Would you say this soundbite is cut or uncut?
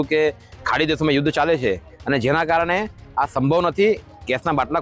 uncut